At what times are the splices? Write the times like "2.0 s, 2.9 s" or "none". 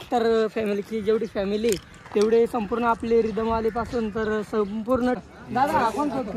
5.2 s